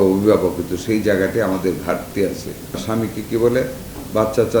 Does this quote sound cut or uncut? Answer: cut